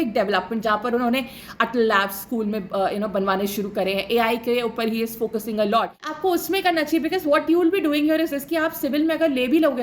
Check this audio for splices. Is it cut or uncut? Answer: cut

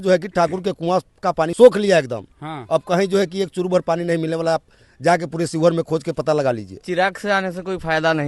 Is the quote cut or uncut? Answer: cut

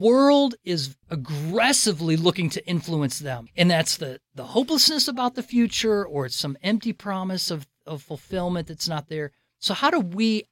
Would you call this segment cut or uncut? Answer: cut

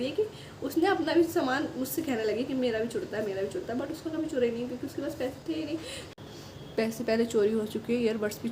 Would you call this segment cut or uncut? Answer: cut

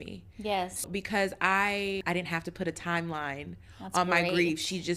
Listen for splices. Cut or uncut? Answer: cut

